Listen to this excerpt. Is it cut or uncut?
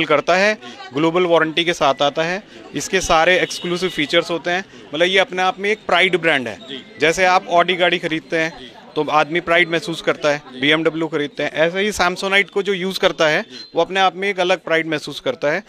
uncut